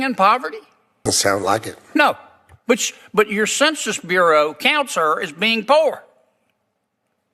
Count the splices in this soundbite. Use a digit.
1